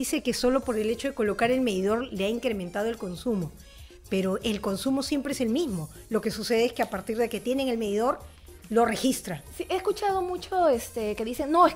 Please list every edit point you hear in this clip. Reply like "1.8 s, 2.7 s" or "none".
none